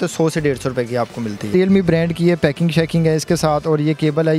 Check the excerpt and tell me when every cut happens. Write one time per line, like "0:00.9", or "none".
0:01.5